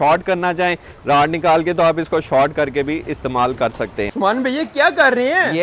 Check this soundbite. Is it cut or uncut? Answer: cut